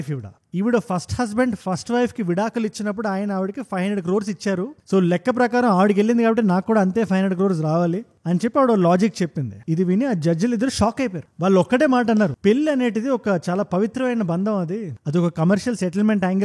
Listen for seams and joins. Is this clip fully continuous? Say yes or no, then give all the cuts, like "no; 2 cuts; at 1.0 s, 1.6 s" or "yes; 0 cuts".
yes; 0 cuts